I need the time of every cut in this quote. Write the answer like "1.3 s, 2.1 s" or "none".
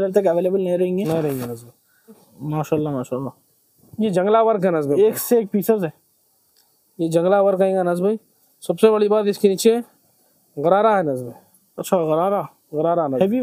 2.3 s